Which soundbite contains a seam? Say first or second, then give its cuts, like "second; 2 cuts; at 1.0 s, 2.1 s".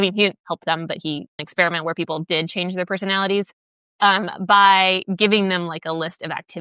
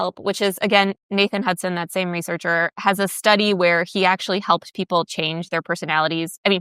first; 1 cut; at 1.4 s